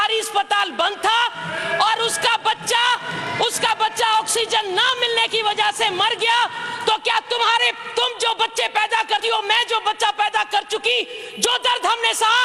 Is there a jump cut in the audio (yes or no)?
no